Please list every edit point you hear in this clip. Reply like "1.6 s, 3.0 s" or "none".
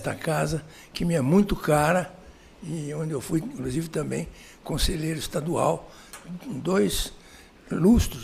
none